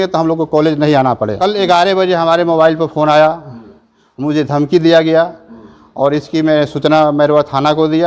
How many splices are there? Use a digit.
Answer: 1